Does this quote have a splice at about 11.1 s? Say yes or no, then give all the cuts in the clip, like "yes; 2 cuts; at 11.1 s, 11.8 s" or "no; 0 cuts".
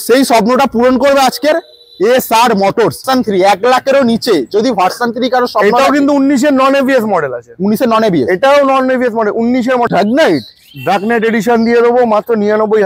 no; 2 cuts; at 3.0 s, 9.9 s